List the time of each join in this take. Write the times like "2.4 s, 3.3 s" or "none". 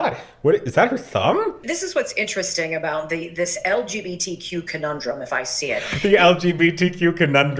1.6 s